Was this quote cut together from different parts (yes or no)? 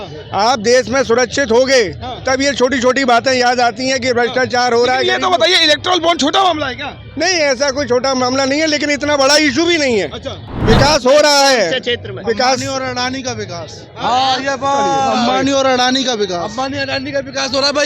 yes